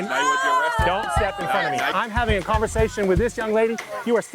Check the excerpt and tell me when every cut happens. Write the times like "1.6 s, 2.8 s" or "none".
1.9 s